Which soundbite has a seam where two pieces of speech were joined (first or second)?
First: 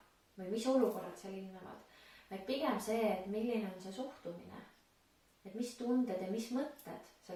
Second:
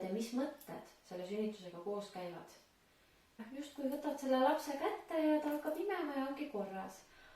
second